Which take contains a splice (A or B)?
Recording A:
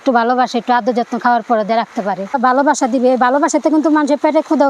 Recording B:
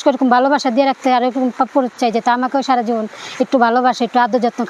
A